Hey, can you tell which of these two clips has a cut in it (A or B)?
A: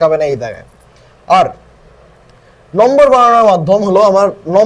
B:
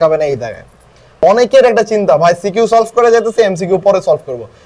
B